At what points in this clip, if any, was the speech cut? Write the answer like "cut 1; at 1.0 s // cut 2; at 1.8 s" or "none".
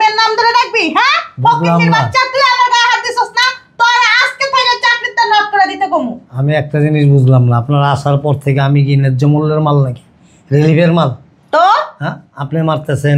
none